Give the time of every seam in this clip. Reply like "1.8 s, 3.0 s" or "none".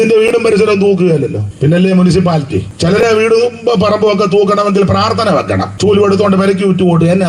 1.4 s, 2.7 s, 5.7 s